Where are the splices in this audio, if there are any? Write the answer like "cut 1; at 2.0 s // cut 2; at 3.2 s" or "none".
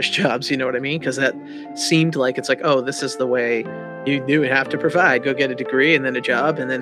cut 1; at 3.9 s // cut 2; at 5.6 s